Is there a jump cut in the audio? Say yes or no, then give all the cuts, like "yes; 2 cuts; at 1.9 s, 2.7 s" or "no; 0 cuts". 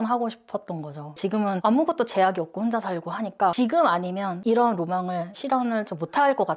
no; 0 cuts